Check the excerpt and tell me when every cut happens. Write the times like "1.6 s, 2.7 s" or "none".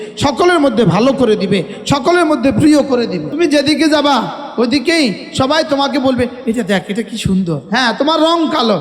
3.3 s, 7.6 s